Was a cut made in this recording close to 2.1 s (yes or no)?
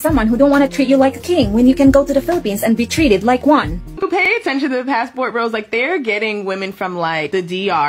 no